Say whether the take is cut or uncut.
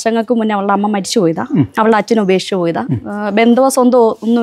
uncut